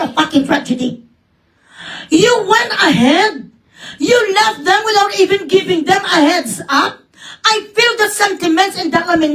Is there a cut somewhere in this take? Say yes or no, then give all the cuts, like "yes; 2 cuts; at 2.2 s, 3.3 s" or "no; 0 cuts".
no; 0 cuts